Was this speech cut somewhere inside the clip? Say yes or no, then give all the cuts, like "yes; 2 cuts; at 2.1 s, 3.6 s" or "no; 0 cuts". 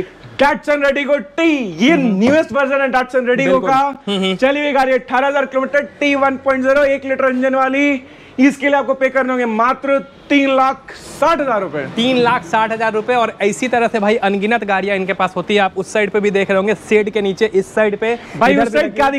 no; 0 cuts